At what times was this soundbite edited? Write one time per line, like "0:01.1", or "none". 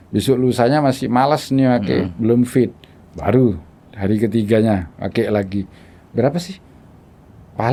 none